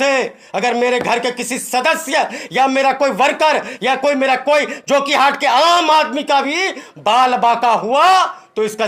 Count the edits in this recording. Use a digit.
0